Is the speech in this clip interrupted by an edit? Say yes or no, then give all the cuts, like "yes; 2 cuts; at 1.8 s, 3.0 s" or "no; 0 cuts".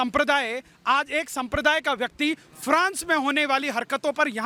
no; 0 cuts